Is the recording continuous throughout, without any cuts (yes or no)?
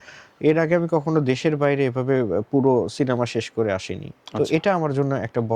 yes